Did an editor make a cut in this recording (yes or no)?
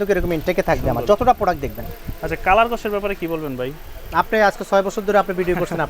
no